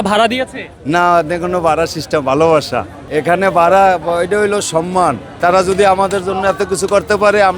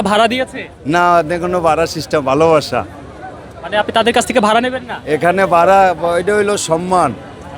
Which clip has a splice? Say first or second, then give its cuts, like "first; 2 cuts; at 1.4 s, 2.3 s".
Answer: first; 2 cuts; at 3.0 s, 5.3 s